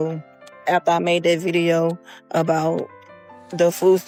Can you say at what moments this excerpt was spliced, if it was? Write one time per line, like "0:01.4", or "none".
none